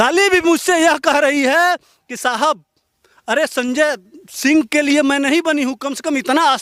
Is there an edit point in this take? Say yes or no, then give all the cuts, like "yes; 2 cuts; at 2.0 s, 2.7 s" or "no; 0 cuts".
no; 0 cuts